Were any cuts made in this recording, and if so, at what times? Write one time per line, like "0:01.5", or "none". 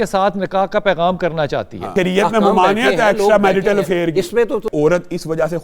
0:01.9
0:04.7